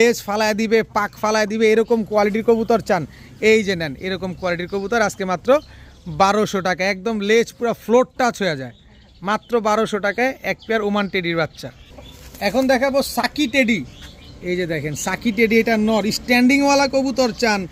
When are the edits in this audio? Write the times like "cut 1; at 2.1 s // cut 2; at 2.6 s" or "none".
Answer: none